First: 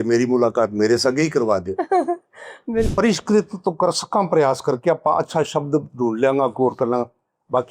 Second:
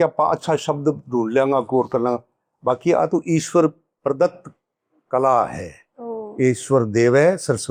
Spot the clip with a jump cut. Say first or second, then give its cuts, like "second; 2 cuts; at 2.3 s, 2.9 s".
first; 1 cut; at 2.9 s